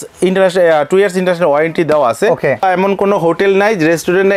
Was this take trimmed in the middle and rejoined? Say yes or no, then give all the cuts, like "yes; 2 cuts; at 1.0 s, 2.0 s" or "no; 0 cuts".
yes; 1 cut; at 2.6 s